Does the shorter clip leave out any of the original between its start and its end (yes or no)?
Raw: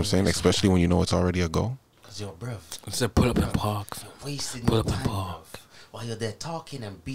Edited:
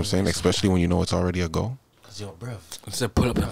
no